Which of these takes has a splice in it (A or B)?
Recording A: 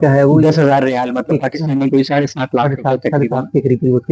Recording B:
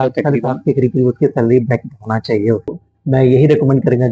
B